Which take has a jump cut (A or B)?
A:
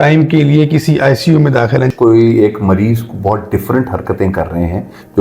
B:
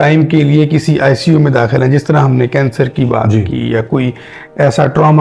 A